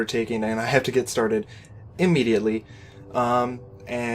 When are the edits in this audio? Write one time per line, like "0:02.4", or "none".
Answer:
0:01.1